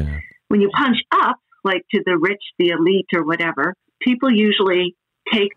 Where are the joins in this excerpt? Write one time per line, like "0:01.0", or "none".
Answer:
none